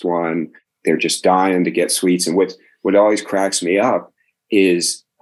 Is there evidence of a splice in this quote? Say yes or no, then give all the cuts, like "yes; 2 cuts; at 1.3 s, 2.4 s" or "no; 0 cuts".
no; 0 cuts